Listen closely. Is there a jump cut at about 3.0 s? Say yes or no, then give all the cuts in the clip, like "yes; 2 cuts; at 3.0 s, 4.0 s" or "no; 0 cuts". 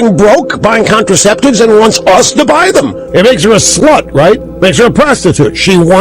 yes; 2 cuts; at 3.0 s, 4.5 s